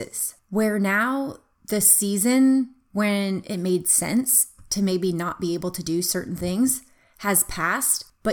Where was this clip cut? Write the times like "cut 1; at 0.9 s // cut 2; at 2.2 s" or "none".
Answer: none